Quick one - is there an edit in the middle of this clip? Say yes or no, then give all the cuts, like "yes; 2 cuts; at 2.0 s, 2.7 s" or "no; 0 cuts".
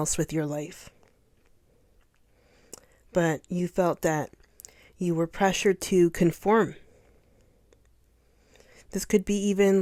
no; 0 cuts